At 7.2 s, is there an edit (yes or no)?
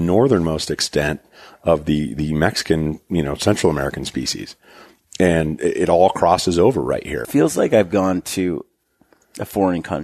yes